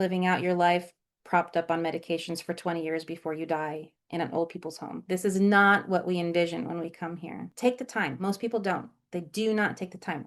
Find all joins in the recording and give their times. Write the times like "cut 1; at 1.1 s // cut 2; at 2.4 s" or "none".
cut 1; at 7.4 s